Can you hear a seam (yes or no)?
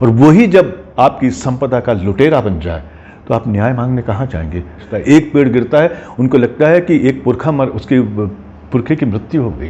yes